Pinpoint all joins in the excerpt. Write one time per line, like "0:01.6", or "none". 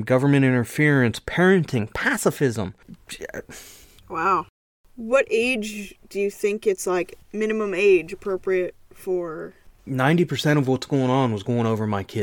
0:04.7